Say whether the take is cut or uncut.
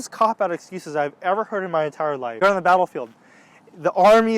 cut